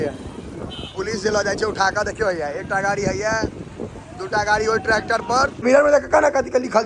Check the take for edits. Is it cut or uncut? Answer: cut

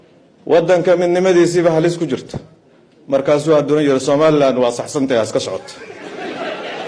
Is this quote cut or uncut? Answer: uncut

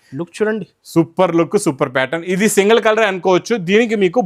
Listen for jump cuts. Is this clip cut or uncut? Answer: uncut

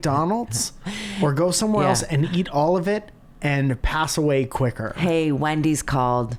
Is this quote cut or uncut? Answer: uncut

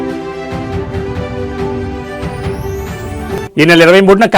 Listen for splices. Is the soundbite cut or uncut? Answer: cut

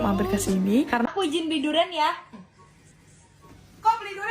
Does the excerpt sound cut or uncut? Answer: cut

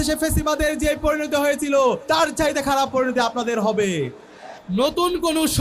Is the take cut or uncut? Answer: cut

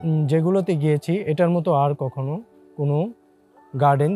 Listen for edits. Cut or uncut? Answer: uncut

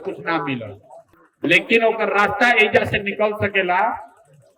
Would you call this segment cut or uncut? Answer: uncut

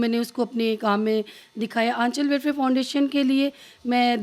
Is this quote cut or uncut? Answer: uncut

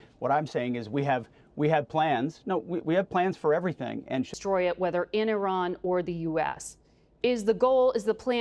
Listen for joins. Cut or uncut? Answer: cut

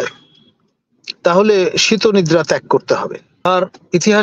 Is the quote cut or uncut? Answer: cut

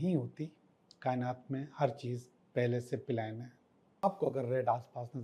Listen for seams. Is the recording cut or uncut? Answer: cut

